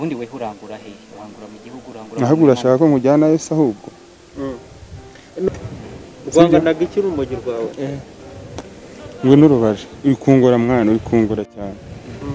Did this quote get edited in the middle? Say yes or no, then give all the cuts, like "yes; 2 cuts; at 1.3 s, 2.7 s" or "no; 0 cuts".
yes; 1 cut; at 5.5 s